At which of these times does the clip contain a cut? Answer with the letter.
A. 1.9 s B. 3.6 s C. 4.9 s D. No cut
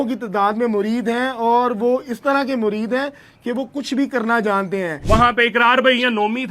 C